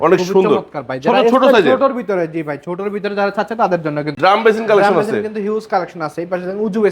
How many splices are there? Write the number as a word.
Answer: one